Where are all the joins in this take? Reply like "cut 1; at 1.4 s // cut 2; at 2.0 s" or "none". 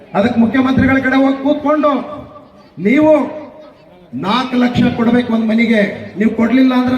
none